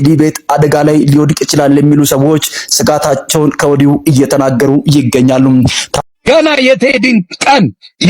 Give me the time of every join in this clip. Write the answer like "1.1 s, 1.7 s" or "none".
6.1 s

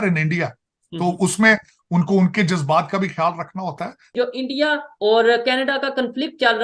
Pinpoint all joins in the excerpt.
4.1 s

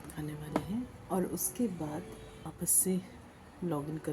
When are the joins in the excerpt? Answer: 1.0 s, 2.5 s

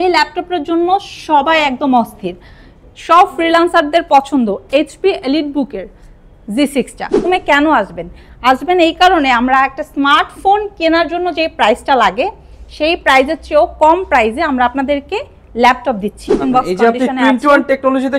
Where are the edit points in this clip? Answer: 7.3 s, 16.4 s

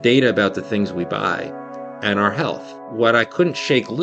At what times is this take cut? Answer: 2.8 s

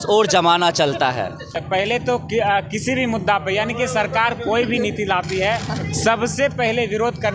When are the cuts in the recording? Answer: 1.6 s

